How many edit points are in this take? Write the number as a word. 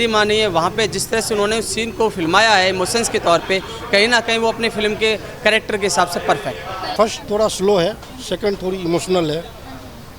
one